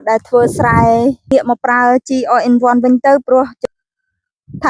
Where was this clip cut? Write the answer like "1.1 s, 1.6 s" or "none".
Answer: 1.3 s, 3.6 s